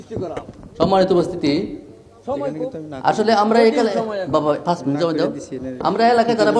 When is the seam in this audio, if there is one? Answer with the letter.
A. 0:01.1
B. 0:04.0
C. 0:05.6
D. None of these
D